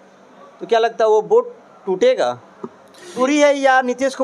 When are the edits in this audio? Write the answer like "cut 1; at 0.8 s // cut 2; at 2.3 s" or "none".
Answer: cut 1; at 3.2 s